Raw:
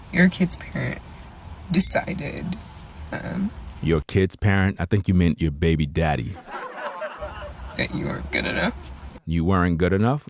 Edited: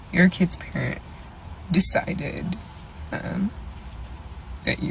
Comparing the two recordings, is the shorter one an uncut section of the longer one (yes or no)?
no